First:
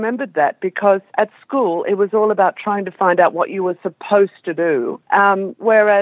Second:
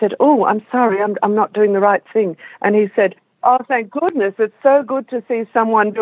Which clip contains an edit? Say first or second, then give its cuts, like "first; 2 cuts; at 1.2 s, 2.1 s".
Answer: first; 2 cuts; at 1.1 s, 5.0 s